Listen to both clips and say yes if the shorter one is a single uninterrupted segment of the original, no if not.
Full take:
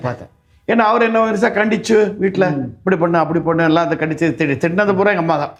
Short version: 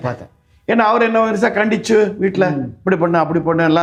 yes